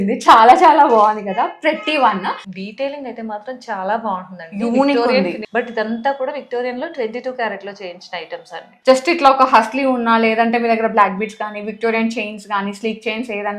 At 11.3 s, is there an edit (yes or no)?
no